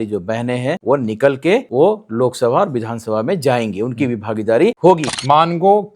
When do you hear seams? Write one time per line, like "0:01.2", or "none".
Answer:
0:00.8
0:01.7
0:05.0